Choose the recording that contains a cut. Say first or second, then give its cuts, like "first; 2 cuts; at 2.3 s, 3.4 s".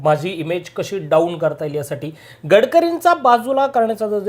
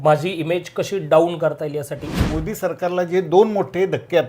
second; 1 cut; at 2.3 s